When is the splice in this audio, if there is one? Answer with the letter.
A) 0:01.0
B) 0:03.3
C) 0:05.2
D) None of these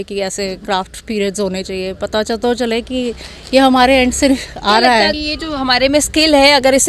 D